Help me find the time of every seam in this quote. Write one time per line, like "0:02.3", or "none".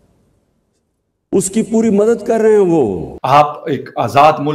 0:03.1